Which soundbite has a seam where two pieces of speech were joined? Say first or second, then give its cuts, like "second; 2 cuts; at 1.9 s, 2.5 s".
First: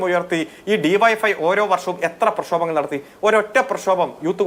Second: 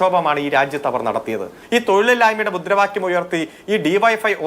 second; 1 cut; at 1.6 s